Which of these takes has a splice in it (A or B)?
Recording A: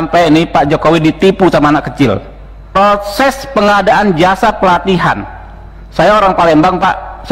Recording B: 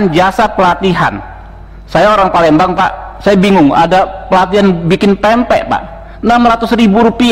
A